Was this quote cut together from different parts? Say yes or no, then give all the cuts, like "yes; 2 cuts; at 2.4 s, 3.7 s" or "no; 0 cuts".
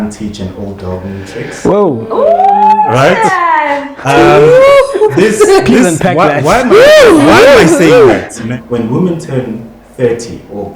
yes; 1 cut; at 8.5 s